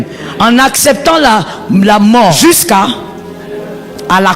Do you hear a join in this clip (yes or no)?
yes